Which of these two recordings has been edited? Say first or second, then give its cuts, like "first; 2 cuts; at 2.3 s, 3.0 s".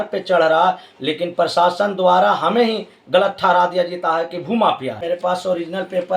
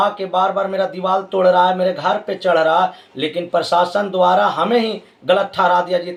first; 1 cut; at 5.0 s